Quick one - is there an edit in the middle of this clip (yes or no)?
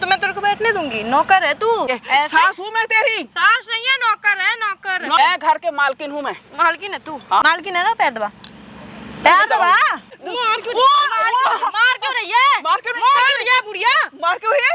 yes